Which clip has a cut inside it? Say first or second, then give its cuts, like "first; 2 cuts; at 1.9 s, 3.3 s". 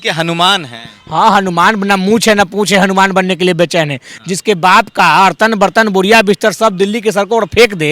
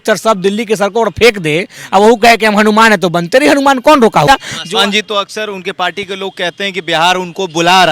second; 1 cut; at 4.3 s